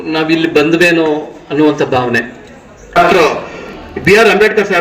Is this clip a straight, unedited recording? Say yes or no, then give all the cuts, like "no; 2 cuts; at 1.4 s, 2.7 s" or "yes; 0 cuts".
no; 1 cut; at 2.9 s